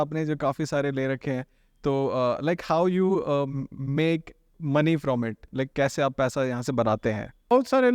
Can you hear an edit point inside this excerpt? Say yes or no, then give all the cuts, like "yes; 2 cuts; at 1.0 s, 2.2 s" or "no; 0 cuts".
no; 0 cuts